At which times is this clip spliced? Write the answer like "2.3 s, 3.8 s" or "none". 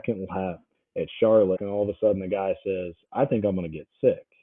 1.6 s

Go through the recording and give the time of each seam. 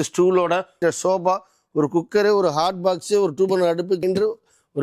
none

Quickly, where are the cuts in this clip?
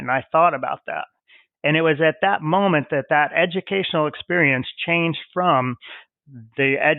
none

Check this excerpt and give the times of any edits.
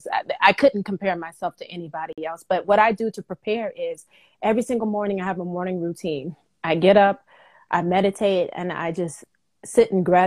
none

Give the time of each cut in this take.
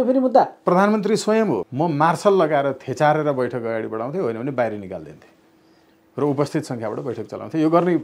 1.7 s

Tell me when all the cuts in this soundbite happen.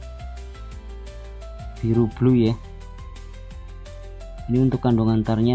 1.8 s, 2.6 s, 4.5 s

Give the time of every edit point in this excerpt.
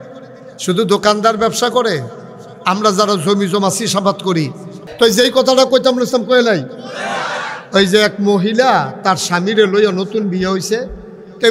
4.9 s

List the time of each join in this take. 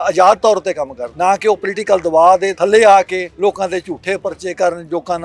1.0 s, 2.5 s, 3.3 s

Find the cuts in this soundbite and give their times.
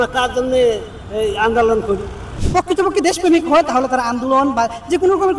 2.3 s

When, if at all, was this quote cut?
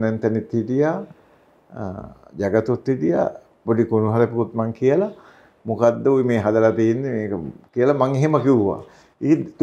none

